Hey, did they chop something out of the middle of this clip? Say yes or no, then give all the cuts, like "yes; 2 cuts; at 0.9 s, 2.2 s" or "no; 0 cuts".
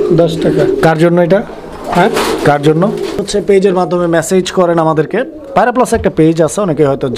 yes; 1 cut; at 3.2 s